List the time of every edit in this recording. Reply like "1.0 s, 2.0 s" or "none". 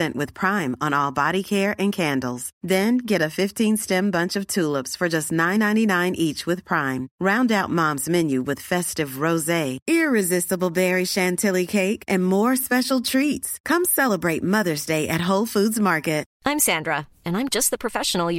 16.3 s